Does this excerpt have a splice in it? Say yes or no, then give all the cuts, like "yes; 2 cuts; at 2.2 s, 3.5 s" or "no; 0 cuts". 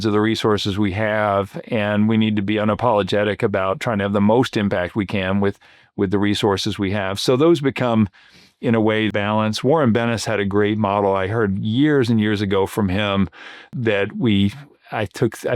yes; 2 cuts; at 9.1 s, 13.7 s